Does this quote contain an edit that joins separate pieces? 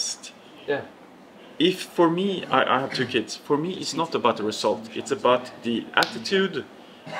no; 0 cuts

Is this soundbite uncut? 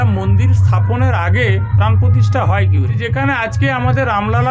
no; 1 cut; at 3.0 s

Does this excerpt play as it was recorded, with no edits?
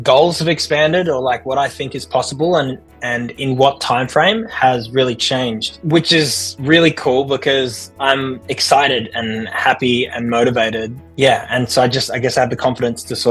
yes; 0 cuts

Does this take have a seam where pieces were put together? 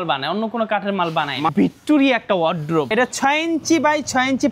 yes; 2 cuts; at 1.5 s, 2.9 s

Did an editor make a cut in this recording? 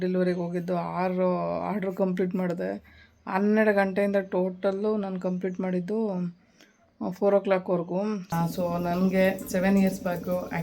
yes; 1 cut; at 8.4 s

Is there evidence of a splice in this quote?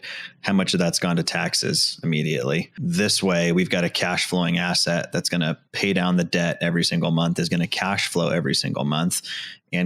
yes; 1 cut; at 2.7 s

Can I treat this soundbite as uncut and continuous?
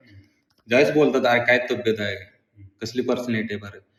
yes; 0 cuts

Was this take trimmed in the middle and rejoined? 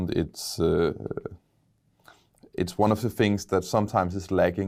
no; 0 cuts

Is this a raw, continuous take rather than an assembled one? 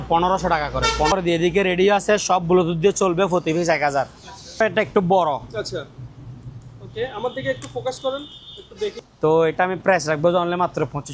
no; 3 cuts; at 1.1 s, 4.6 s, 9.0 s

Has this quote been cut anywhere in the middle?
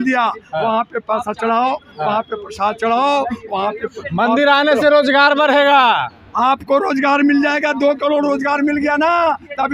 no; 0 cuts

